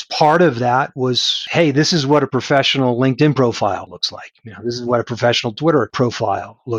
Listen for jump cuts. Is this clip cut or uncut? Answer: cut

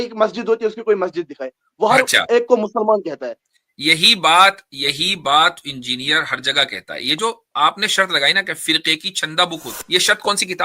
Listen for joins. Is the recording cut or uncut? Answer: cut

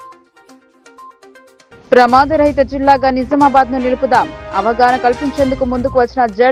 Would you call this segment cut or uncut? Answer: uncut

